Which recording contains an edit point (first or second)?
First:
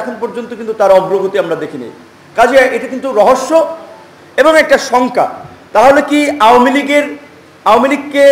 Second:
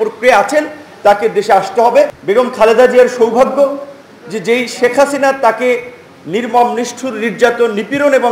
second